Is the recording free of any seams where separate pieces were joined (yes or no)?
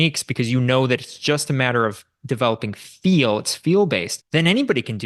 no